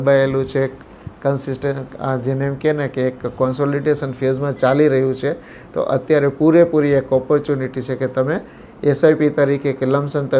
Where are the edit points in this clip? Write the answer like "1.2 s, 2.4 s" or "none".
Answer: none